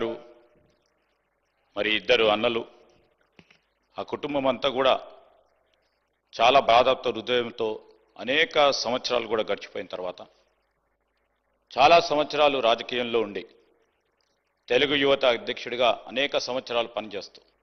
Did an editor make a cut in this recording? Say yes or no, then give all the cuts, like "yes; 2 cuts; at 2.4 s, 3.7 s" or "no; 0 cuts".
no; 0 cuts